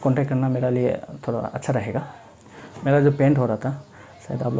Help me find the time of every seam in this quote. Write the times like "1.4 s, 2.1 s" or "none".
2.7 s

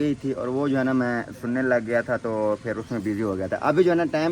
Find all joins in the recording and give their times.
none

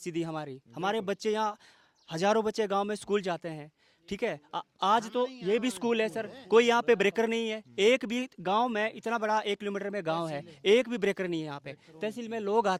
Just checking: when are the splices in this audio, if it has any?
none

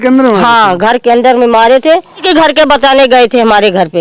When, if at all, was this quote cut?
2.2 s

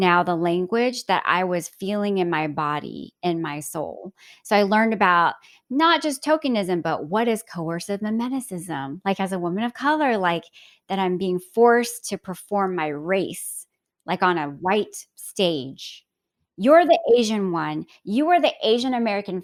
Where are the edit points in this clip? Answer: none

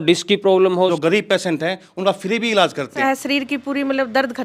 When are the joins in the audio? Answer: 0.9 s, 3.0 s

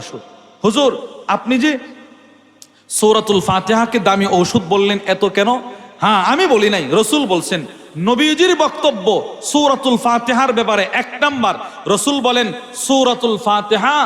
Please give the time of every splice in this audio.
none

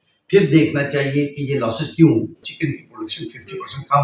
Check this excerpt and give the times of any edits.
2.4 s

